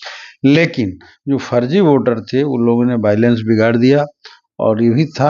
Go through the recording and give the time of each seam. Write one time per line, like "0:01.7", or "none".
none